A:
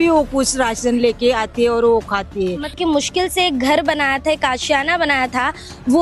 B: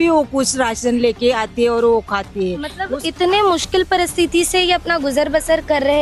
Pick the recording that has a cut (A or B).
A